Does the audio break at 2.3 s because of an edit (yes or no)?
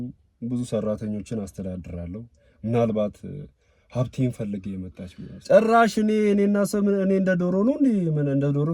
no